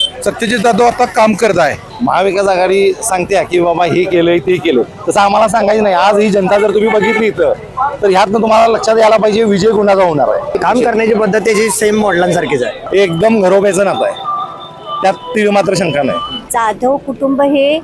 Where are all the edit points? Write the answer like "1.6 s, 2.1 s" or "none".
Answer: 1.9 s, 10.6 s, 12.8 s, 16.5 s